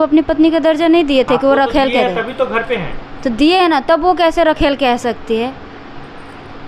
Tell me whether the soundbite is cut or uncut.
uncut